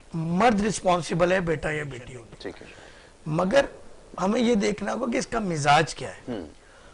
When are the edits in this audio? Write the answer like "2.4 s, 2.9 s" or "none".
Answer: 2.1 s